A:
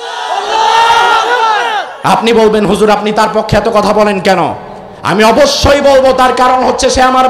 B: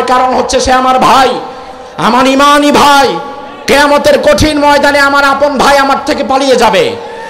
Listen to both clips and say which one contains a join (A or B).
A